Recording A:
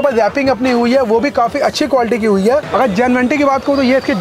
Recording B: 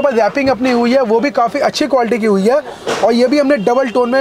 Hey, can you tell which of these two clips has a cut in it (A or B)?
A